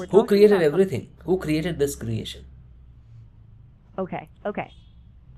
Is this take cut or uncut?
uncut